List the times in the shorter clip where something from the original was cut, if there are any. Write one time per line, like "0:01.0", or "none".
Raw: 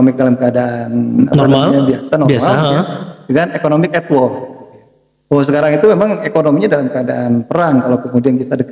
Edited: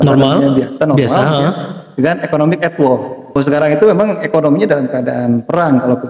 0:03.4